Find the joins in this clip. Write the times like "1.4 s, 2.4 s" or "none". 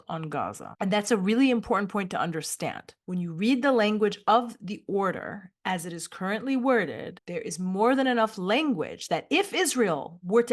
none